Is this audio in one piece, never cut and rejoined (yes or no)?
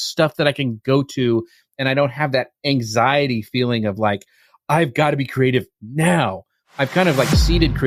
yes